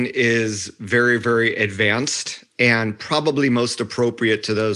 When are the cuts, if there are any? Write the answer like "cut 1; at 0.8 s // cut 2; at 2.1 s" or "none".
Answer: none